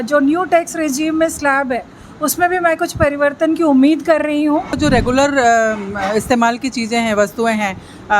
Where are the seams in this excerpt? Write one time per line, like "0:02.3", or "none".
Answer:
0:04.8